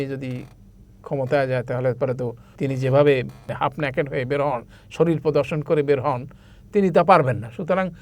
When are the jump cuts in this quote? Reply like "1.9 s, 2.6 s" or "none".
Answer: 2.4 s, 3.5 s